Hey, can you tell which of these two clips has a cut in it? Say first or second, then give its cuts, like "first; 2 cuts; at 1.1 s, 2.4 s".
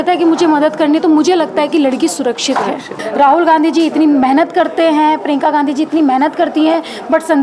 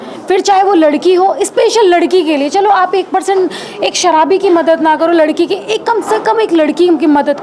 first; 1 cut; at 3.0 s